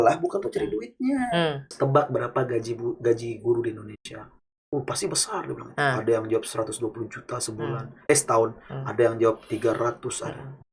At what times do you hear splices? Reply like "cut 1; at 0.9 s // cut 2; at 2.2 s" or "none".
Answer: cut 1; at 1.7 s